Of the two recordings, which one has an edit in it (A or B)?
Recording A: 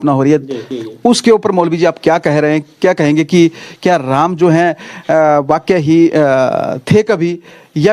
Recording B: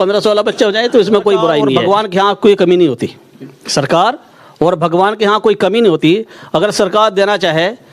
B